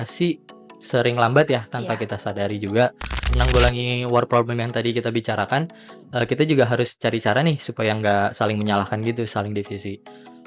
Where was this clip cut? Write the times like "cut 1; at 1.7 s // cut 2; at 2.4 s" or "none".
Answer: cut 1; at 3.2 s